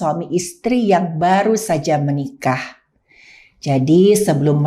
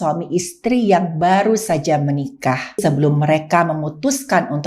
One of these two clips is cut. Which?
second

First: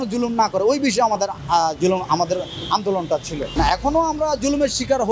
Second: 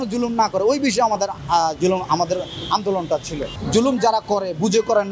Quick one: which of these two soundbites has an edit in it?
second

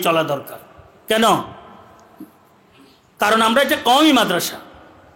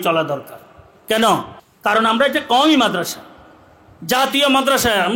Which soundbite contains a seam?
second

